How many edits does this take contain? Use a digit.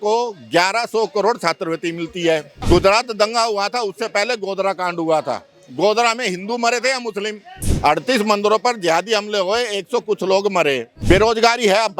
3